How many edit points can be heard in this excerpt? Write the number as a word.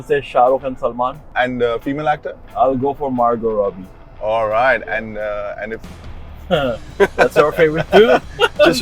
two